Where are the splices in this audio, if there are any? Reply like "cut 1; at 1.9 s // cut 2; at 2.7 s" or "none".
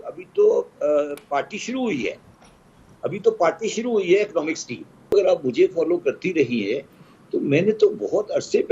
cut 1; at 5.1 s